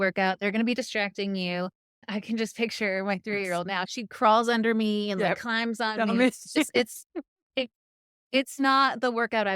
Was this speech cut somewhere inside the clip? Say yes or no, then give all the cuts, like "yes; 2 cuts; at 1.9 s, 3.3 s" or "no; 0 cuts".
yes; 2 cuts; at 2.0 s, 3.9 s